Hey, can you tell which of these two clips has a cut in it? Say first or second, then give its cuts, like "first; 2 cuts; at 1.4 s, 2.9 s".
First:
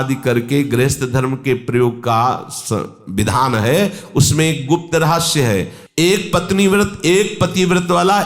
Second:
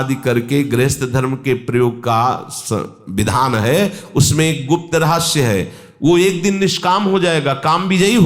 first; 1 cut; at 5.8 s